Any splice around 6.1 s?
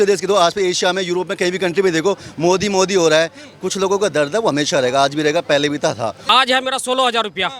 yes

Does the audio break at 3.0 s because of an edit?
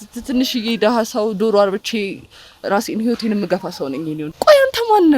no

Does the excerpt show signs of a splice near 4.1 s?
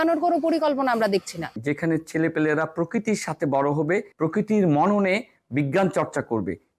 yes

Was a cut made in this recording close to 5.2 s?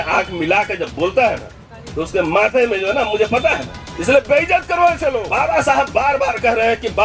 yes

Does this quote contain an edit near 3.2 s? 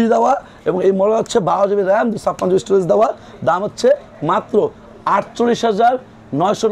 no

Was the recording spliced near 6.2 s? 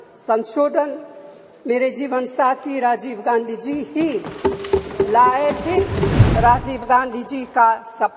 yes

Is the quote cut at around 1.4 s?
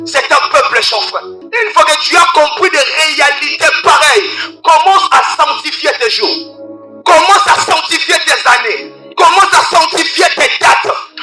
yes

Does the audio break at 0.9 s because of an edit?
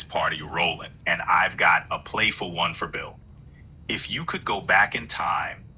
yes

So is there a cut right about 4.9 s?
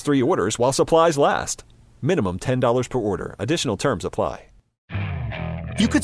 yes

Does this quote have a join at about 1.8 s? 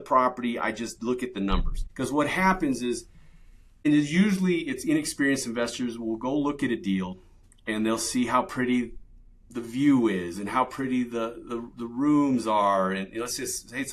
yes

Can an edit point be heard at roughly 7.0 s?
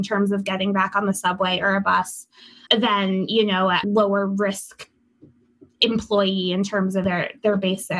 yes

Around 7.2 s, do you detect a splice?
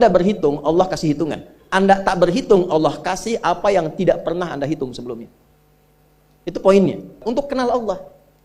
yes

